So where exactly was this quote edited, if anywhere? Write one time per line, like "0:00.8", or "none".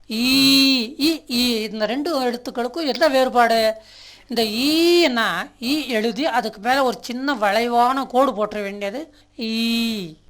0:09.2